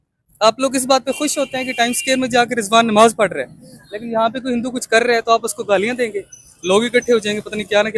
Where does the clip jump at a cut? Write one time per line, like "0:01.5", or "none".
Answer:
none